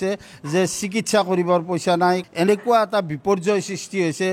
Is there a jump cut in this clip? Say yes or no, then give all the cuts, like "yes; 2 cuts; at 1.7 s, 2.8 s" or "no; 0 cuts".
yes; 1 cut; at 2.2 s